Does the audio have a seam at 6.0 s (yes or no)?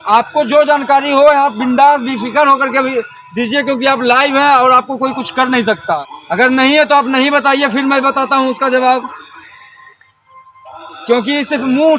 yes